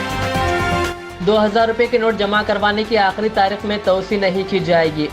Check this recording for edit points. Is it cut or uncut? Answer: cut